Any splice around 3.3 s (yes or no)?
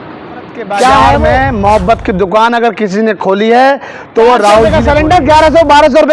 no